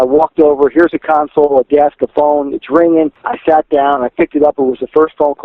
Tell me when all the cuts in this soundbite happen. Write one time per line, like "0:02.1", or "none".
0:03.2